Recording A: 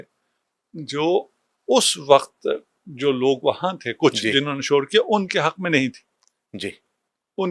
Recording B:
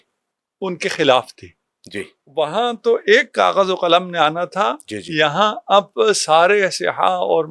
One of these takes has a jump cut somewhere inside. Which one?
B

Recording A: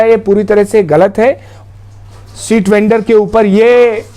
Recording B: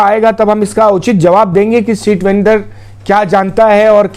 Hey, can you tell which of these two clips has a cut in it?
A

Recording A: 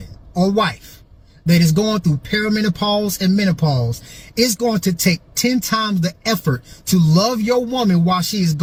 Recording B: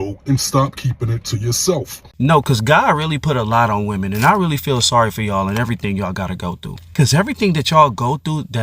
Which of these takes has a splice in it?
B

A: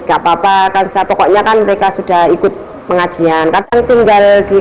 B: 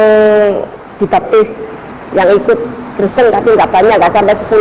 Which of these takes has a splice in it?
A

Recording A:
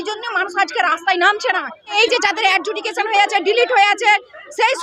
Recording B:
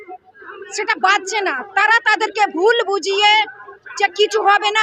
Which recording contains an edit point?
A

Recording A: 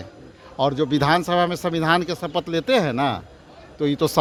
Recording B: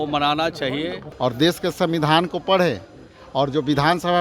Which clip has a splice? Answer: B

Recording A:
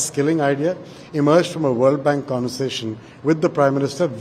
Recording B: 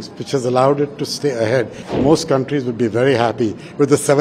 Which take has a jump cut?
B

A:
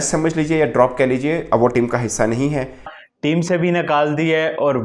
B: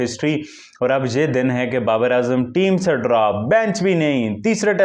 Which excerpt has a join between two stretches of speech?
A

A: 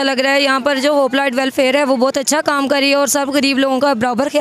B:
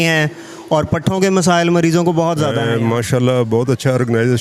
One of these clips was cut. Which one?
B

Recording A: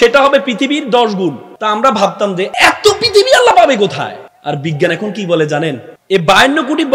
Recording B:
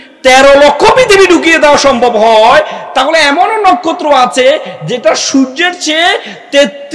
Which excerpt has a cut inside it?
A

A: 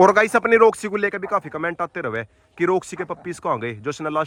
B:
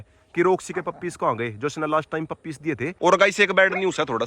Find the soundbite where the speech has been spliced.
B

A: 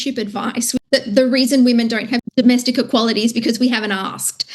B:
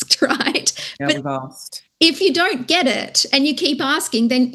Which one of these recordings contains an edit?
A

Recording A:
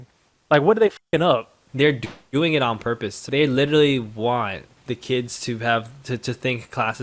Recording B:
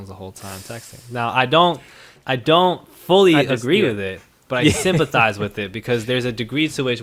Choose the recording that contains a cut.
A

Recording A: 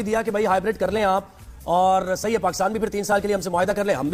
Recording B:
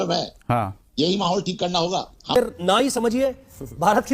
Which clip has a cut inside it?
B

